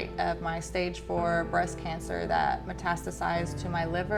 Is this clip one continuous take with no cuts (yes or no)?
yes